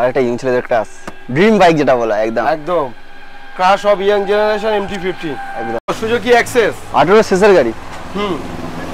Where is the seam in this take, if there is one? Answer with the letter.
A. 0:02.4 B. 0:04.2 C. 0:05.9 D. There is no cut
C